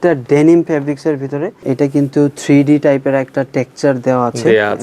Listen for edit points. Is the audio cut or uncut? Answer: cut